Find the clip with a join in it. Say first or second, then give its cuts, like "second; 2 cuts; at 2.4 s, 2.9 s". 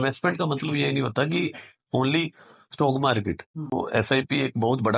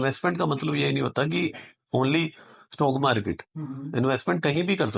first; 1 cut; at 3.7 s